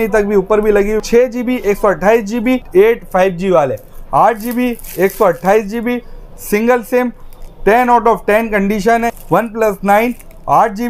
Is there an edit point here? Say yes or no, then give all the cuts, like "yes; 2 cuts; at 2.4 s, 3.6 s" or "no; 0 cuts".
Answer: yes; 3 cuts; at 1.0 s, 2.7 s, 9.1 s